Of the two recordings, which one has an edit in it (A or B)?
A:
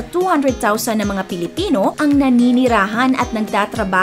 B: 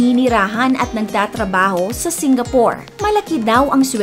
B